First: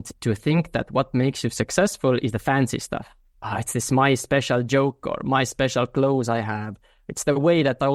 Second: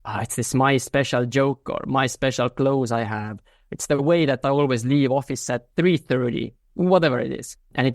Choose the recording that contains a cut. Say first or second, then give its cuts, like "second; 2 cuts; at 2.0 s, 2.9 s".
second; 2 cuts; at 5.6 s, 6.7 s